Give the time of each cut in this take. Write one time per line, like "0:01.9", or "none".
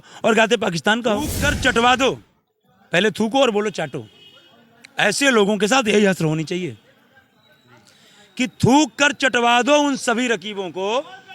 0:01.4